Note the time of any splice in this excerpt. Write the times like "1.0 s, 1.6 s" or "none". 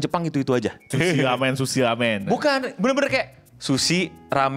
0.9 s